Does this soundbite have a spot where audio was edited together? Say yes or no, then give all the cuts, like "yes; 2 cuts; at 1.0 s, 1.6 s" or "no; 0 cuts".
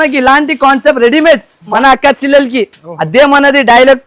yes; 1 cut; at 1.7 s